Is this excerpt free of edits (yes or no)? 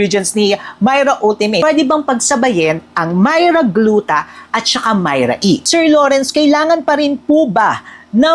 no